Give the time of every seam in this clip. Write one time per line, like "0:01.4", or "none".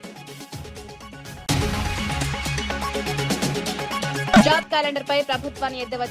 0:01.4
0:04.3